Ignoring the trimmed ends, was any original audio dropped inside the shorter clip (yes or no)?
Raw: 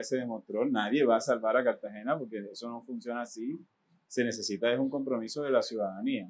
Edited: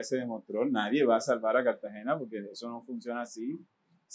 no